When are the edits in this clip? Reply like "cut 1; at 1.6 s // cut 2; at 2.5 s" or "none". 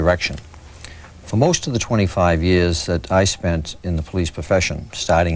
cut 1; at 3.7 s